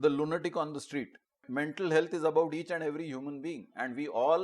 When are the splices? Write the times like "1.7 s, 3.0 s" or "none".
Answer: 1.4 s